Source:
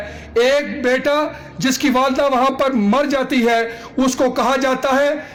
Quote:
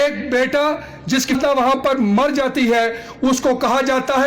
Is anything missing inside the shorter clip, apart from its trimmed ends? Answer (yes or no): yes